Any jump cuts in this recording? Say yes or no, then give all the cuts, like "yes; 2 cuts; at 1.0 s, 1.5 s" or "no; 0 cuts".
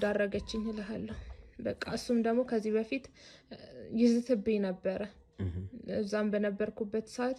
no; 0 cuts